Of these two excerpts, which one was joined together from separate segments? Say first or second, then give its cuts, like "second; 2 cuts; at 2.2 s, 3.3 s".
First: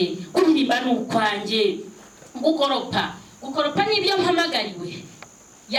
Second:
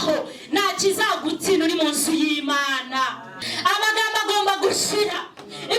second; 1 cut; at 3.3 s